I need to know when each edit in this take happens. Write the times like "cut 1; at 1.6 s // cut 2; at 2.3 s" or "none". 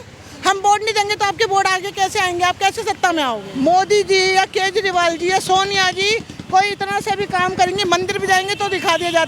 cut 1; at 3.4 s

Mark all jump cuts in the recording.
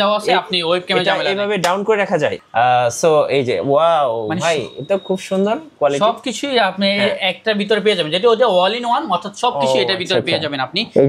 cut 1; at 2.4 s

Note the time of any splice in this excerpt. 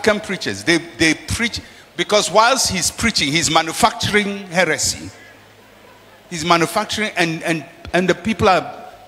none

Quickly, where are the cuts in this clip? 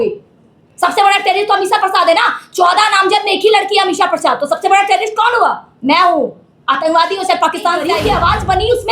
cut 1; at 8.0 s

